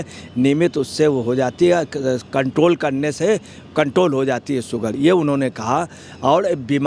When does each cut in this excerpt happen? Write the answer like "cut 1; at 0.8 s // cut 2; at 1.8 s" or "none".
none